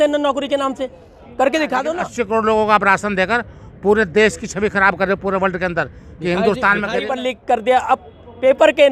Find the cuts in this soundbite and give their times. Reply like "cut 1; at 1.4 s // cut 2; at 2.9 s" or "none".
cut 1; at 2.0 s // cut 2; at 7.0 s